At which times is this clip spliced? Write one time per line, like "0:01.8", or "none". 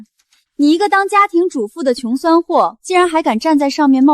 none